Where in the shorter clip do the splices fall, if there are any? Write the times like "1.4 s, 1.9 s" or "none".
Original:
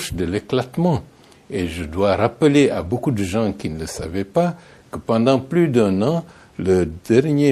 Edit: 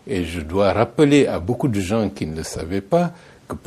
none